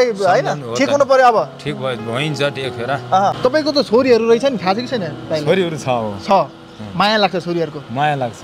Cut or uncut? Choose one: cut